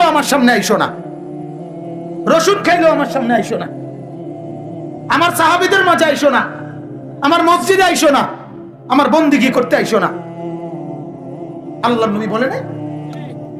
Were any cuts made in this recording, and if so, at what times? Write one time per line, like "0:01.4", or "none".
0:03.6
0:05.0
0:10.2
0:11.6
0:12.7